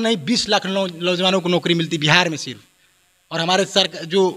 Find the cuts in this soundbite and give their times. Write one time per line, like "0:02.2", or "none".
none